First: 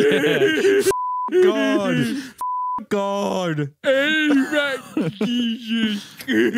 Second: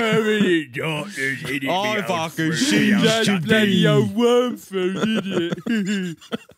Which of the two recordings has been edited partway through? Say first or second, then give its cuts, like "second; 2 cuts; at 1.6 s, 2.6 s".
second; 1 cut; at 3.8 s